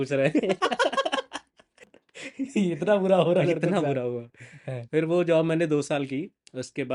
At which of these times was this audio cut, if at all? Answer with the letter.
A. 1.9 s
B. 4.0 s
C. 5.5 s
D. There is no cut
A